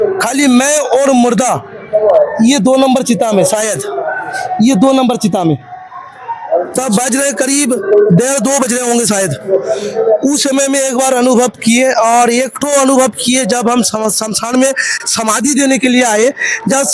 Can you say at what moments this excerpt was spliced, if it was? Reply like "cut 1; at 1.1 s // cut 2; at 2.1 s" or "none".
none